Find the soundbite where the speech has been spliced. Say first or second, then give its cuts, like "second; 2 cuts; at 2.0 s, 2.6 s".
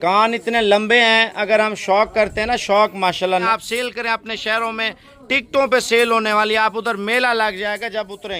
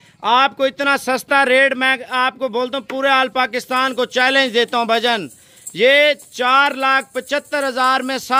first; 1 cut; at 3.4 s